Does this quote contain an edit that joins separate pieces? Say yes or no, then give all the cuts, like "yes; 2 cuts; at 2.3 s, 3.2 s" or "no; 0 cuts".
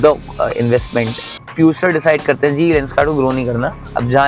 yes; 1 cut; at 1.2 s